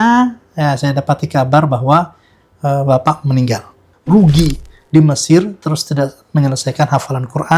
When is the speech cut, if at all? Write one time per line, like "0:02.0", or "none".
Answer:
0:03.9

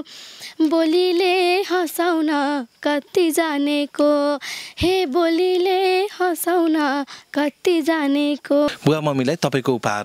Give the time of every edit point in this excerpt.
0:08.7

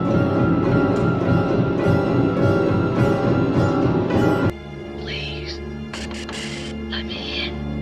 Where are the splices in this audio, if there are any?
0:04.5

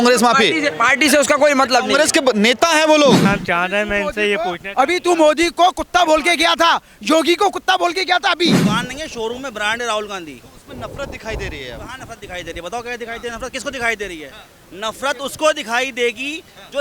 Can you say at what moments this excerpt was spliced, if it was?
0:03.3
0:08.5

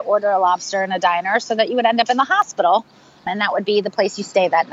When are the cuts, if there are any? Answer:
0:03.3

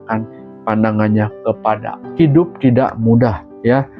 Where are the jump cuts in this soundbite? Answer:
0:02.0

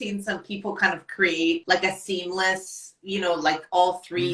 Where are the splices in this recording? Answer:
0:01.6

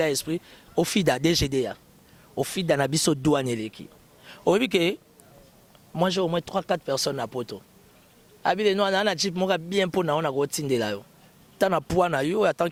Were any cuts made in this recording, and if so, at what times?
none

